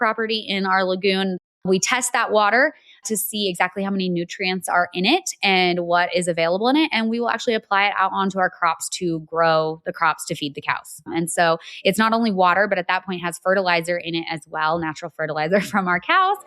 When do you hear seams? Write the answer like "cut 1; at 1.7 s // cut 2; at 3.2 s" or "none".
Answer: cut 1; at 1.3 s